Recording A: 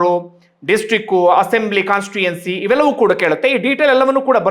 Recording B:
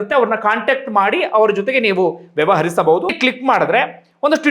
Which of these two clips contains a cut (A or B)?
B